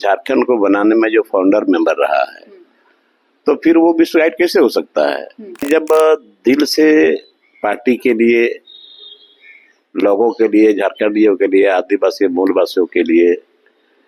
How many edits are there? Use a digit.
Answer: 1